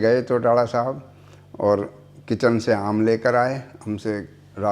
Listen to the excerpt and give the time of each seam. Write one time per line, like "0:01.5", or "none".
0:03.7